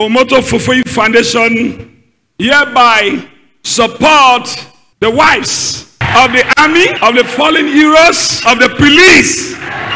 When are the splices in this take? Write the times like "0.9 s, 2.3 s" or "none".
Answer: 6.9 s, 8.3 s